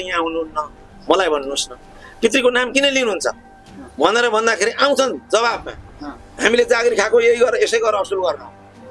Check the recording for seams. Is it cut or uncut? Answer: uncut